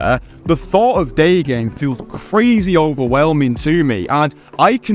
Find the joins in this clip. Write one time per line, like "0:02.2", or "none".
none